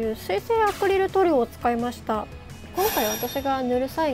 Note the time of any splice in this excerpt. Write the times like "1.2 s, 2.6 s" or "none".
2.6 s